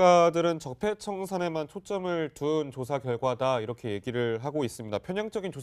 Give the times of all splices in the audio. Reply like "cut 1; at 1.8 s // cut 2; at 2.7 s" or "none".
cut 1; at 4.0 s